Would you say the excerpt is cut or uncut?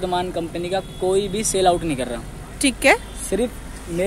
uncut